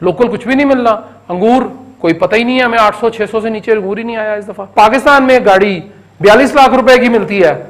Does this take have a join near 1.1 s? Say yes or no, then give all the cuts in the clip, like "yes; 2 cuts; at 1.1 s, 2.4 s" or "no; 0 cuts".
no; 1 cut; at 4.7 s